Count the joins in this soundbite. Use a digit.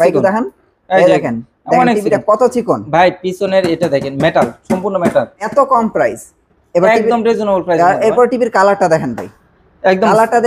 1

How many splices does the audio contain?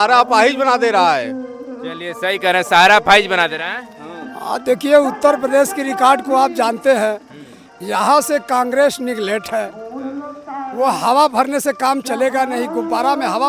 0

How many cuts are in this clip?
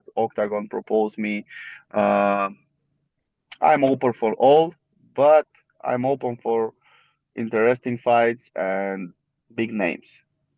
0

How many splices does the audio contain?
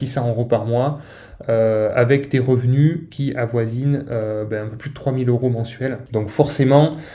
0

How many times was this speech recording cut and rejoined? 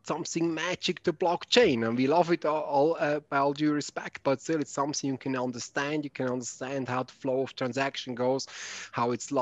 0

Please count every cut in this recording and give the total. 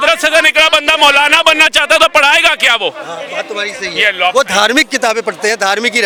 0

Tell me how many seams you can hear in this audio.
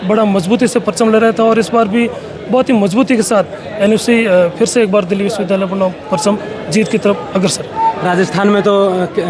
0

